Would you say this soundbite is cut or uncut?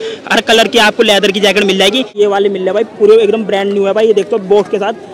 cut